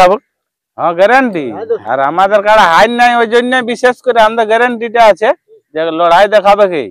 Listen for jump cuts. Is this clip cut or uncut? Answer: cut